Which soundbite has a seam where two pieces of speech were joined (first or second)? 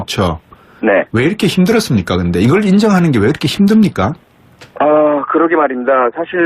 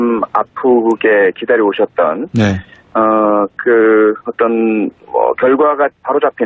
first